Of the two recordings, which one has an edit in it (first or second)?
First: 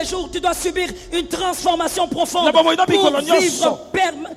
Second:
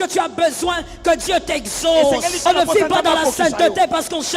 second